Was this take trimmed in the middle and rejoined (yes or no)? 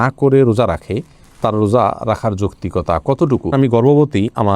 yes